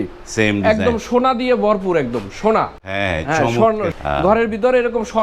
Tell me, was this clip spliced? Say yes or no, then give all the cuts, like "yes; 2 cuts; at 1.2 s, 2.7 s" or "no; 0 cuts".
yes; 1 cut; at 3.9 s